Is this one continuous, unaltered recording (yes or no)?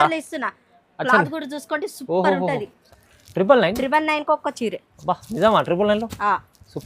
no